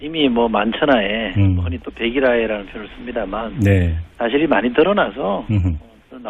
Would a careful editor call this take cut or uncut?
cut